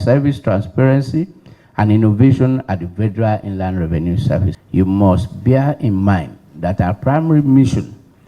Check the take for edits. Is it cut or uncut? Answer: cut